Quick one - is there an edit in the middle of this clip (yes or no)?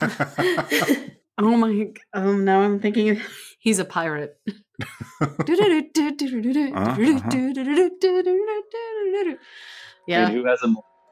yes